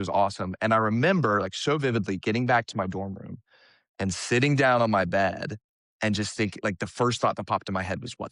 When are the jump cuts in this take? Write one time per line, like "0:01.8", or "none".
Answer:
none